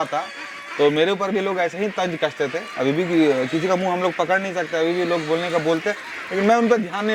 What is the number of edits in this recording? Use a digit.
0